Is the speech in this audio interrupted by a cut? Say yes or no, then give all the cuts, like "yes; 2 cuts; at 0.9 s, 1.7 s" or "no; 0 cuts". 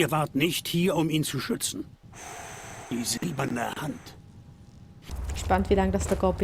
yes; 1 cut; at 5.1 s